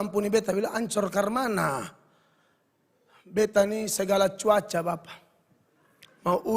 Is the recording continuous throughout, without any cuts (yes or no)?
yes